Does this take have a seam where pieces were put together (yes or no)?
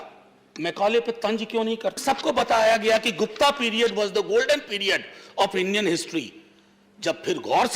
yes